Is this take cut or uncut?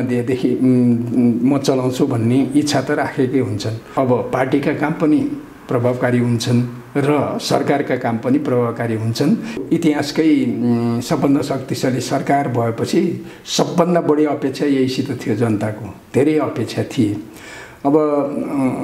cut